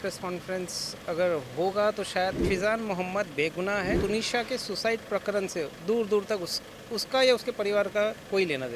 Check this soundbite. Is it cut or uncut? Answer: cut